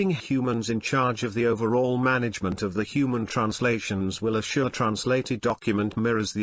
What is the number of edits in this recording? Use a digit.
1